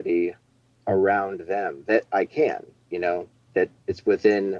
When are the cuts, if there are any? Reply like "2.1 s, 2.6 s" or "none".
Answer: 3.5 s